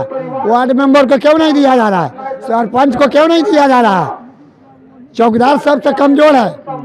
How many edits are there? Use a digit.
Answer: 0